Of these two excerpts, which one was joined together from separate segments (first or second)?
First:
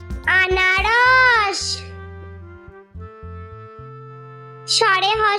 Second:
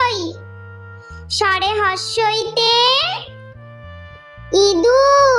first